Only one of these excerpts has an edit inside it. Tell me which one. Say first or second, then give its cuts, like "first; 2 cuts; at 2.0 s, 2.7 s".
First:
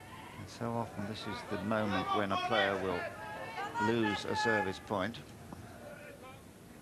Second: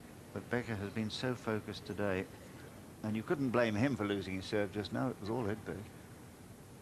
second; 1 cut; at 3.4 s